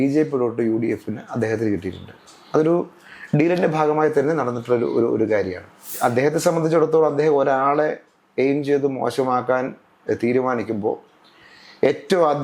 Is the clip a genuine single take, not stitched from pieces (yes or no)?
no